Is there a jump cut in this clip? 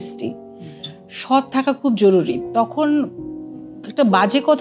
no; 0 cuts

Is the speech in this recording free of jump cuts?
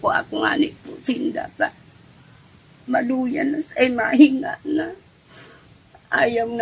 yes; 0 cuts

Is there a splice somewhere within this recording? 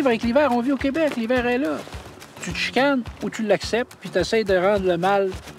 yes; 1 cut; at 2.3 s

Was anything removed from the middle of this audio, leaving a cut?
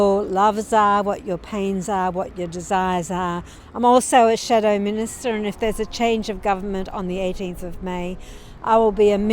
yes; 1 cut; at 3.5 s

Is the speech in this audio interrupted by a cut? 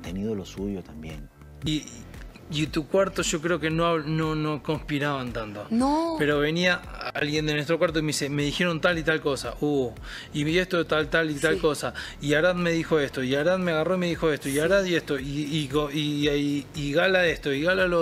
yes; 1 cut; at 1.4 s

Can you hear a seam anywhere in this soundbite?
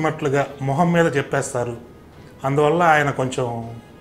no; 0 cuts

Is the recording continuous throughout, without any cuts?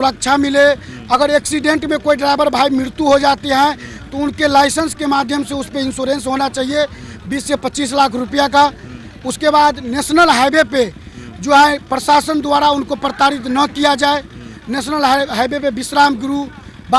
yes; 0 cuts

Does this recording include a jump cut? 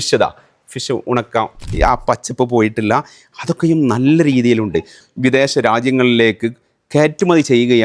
yes; 2 cuts; at 1.6 s, 5.0 s

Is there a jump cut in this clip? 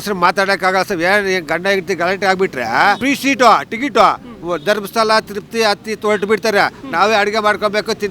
yes; 1 cut; at 3.0 s

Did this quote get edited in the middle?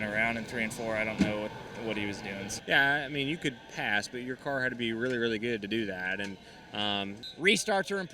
yes; 2 cuts; at 2.5 s, 7.2 s

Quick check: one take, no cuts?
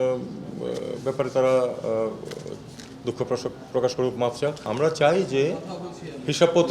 no; 1 cut; at 4.7 s

